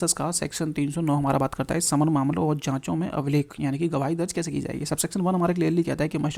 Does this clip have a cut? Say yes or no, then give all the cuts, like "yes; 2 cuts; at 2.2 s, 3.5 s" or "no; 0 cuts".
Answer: no; 0 cuts